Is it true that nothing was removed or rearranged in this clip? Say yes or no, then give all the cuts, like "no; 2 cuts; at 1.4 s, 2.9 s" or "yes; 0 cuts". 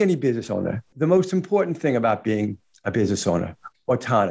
no; 1 cut; at 0.9 s